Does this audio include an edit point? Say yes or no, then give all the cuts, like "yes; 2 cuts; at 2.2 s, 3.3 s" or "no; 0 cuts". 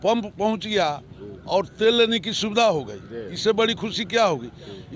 no; 0 cuts